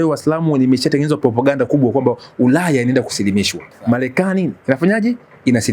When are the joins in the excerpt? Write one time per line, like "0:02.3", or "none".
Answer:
0:03.7